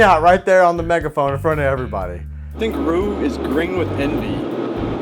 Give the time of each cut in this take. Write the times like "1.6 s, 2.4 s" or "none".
2.6 s